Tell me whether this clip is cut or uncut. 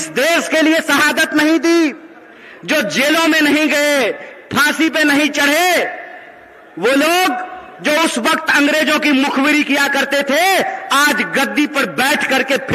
uncut